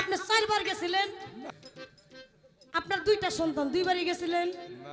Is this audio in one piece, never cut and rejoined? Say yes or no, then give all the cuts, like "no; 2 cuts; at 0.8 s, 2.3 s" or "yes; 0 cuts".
no; 1 cut; at 1.4 s